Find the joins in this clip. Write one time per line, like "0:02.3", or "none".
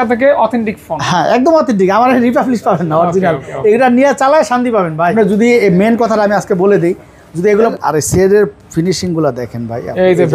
0:05.1
0:07.7